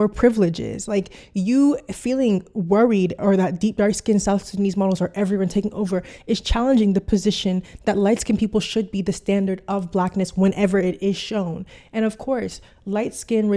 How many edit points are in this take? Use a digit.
0